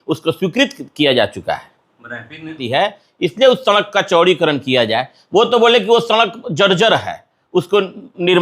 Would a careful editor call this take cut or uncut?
cut